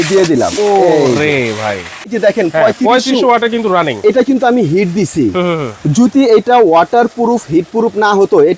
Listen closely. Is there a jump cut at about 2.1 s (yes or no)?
yes